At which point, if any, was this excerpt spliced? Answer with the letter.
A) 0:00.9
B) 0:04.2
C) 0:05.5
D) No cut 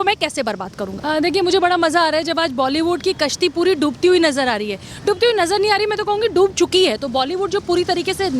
A